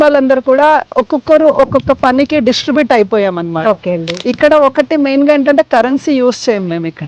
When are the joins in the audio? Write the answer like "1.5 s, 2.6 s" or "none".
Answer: none